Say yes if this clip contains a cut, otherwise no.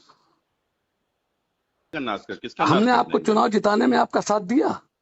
yes